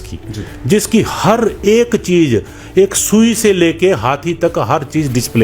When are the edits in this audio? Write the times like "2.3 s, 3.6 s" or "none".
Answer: none